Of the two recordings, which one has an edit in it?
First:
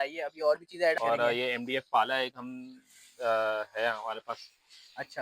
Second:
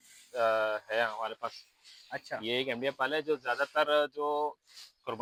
first; 1 cut; at 1.0 s

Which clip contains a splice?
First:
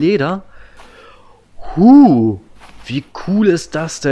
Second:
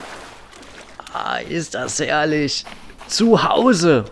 second; 1 cut; at 0.9 s

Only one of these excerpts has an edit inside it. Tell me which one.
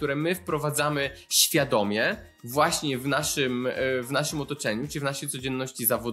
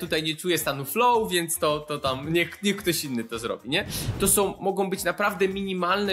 second; 1 cut; at 4.0 s

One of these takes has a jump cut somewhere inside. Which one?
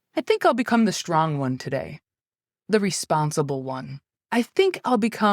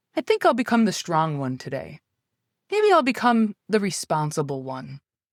first; 2 cuts; at 2.6 s, 4.2 s

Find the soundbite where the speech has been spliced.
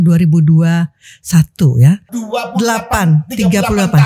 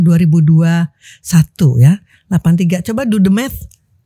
first; 1 cut; at 2.1 s

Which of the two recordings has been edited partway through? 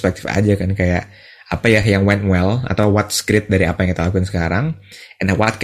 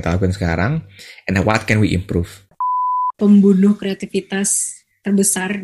second; 1 cut; at 2.8 s

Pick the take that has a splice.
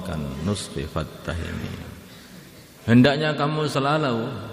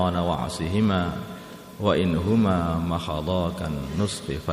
first; 1 cut; at 2.7 s

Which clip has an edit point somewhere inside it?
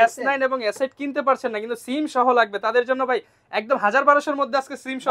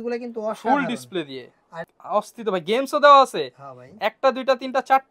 second; 1 cut; at 1.8 s

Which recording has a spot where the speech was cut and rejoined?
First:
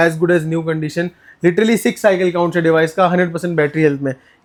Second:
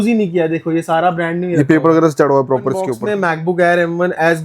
second; 1 cut; at 3.0 s

